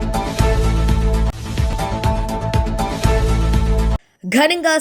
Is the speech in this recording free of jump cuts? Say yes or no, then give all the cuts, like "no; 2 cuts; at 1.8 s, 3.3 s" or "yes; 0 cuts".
yes; 0 cuts